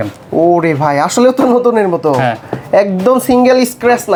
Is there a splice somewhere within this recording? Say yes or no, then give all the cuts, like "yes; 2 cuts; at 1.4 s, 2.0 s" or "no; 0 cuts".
no; 0 cuts